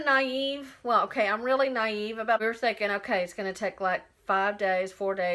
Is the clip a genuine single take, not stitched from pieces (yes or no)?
no